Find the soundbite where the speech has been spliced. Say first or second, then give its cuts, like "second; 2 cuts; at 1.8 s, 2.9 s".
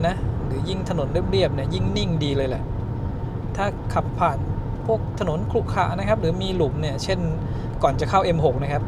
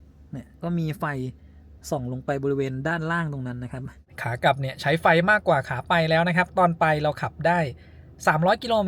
second; 1 cut; at 4.2 s